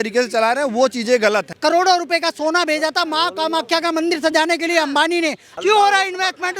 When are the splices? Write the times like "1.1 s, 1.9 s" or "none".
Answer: 1.5 s, 5.5 s